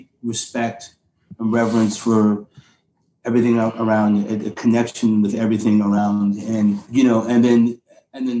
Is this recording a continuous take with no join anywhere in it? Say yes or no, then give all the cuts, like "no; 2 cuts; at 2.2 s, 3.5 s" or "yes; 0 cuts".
no; 1 cut; at 6.0 s